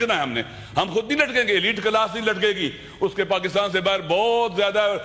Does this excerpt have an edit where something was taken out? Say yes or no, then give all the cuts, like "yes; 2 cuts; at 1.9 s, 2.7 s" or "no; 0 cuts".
no; 0 cuts